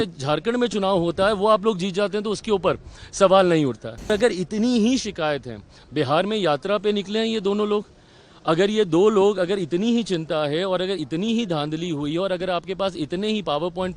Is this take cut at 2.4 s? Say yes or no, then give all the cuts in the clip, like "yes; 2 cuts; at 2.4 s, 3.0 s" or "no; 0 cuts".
no; 1 cut; at 4.1 s